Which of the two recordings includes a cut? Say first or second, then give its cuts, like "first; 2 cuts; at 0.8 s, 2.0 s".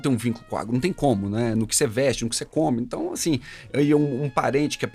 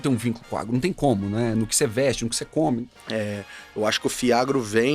second; 1 cut; at 2.9 s